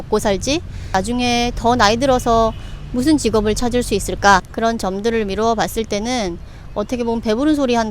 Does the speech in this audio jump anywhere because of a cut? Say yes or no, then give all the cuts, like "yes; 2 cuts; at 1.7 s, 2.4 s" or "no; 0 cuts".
yes; 2 cuts; at 0.9 s, 4.5 s